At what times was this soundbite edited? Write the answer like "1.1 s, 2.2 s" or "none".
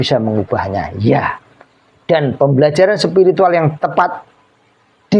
none